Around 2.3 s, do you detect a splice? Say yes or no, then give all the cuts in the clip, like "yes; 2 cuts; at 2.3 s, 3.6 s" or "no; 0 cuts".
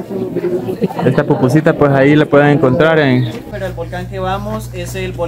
no; 1 cut; at 3.6 s